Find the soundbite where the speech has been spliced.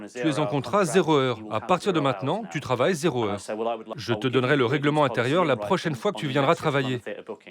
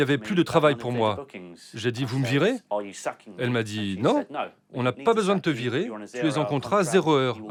first; 1 cut; at 3.9 s

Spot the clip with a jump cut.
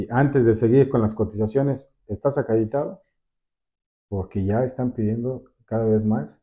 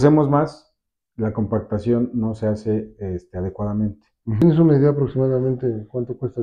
second; 1 cut; at 4.4 s

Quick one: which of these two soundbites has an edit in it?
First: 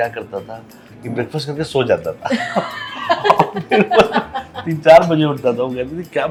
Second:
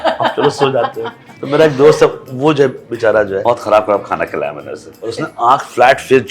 second; 3 cuts; at 1.3 s, 3.4 s, 5.0 s

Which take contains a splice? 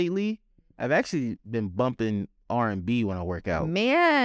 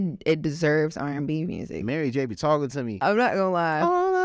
second; 1 cut; at 1.8 s

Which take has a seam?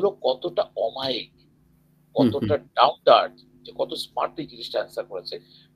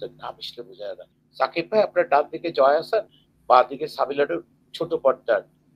second; 1 cut; at 1.2 s

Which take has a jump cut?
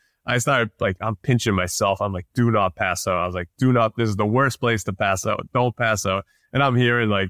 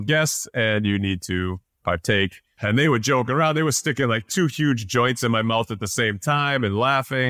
second; 1 cut; at 2.5 s

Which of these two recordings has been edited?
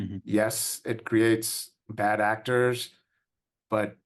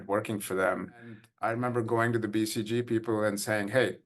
second; 1 cut; at 1.3 s

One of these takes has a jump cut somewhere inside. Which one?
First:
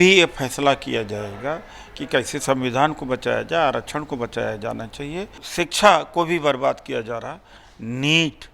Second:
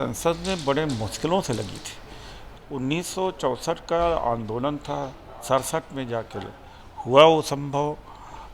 first; 1 cut; at 5.4 s

